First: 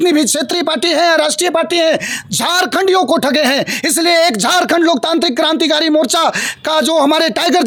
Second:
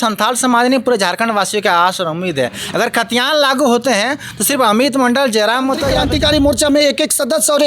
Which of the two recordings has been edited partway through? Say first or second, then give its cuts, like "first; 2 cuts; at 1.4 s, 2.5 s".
second; 1 cut; at 6.0 s